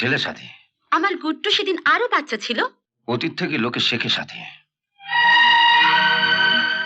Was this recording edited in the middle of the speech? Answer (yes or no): yes